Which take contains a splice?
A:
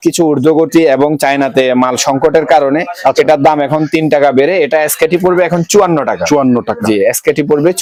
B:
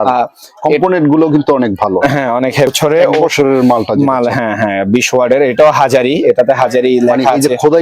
B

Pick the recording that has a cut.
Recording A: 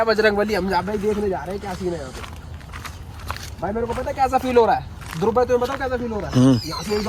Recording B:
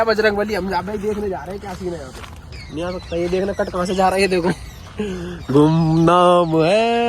B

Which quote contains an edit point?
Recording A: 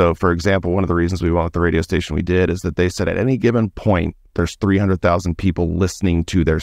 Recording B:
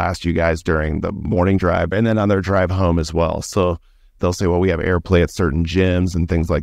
B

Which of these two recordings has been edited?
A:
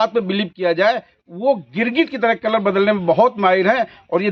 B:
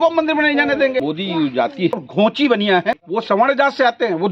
B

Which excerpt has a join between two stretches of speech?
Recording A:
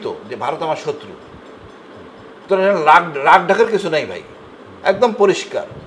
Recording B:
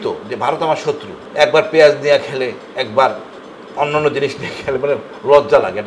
B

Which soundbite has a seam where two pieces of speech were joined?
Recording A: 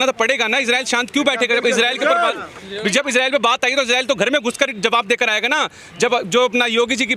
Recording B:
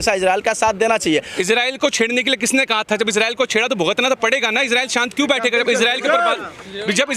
B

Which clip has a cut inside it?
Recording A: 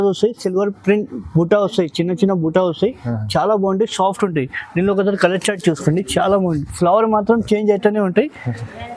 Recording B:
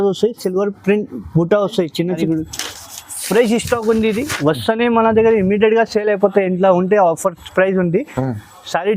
B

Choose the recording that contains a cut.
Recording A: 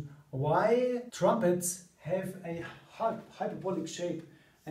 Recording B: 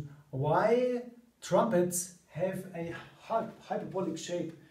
A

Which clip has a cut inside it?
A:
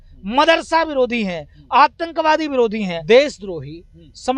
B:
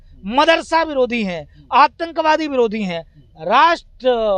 A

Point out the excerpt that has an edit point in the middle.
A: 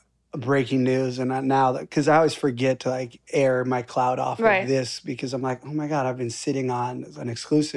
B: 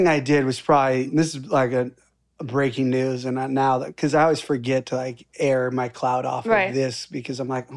B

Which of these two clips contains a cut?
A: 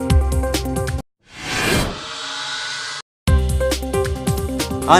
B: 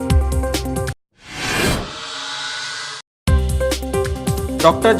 B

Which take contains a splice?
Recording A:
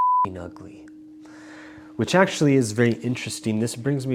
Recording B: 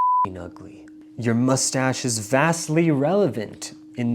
B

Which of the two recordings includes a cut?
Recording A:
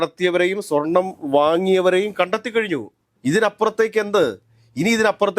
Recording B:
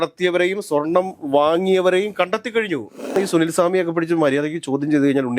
B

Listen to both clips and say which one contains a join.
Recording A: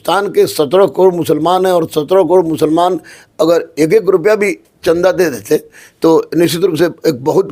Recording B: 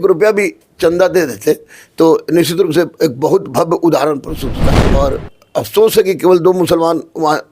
B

